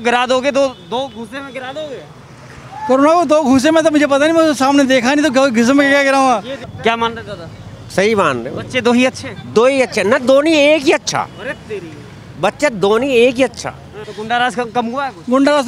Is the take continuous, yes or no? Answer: no